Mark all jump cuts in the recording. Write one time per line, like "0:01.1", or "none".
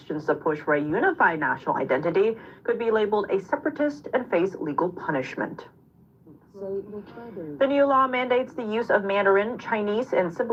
none